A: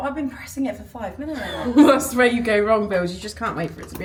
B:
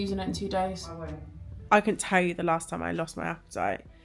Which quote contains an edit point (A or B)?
B